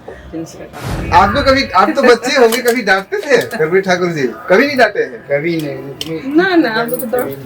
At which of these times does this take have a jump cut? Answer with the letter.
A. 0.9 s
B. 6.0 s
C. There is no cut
A